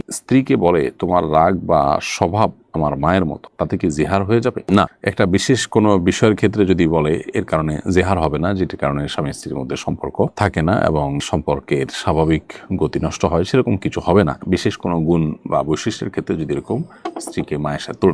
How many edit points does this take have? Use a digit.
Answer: 0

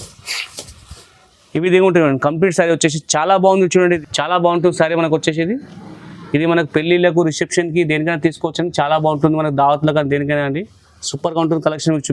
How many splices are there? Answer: 1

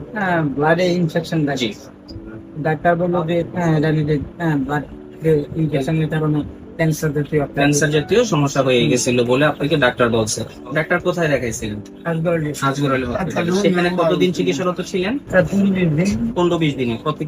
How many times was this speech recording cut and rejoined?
0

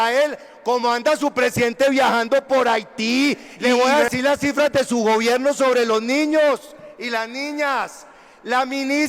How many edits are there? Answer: 1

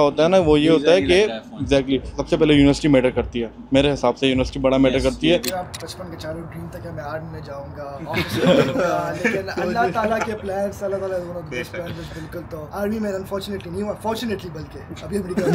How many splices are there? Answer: 2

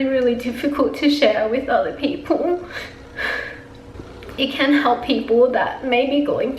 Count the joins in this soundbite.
1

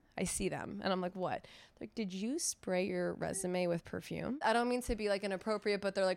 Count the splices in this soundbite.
1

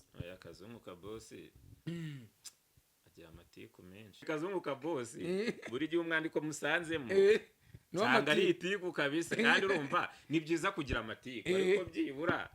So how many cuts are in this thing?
1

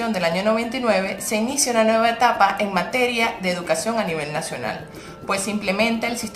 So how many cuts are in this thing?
1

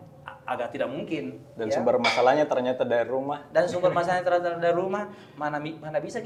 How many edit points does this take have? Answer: 0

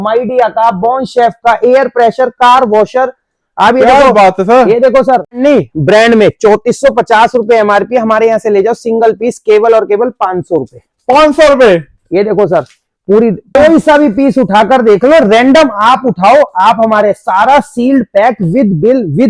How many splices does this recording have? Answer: 2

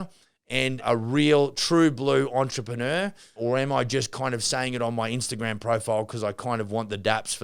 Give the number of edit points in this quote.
2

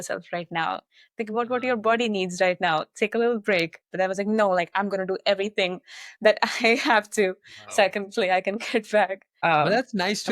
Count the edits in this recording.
1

